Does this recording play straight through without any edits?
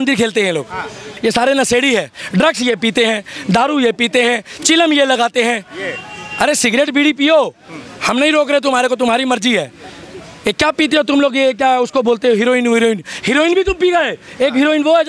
no; 1 cut; at 1.1 s

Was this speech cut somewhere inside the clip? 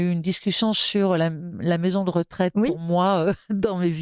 no; 0 cuts

